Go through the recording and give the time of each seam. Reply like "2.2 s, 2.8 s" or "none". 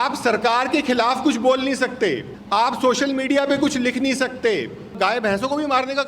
2.3 s, 4.9 s